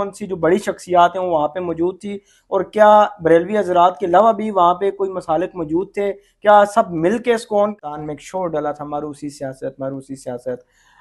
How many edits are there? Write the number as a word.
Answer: one